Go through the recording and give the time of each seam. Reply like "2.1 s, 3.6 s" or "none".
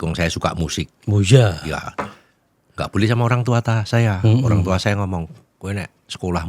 none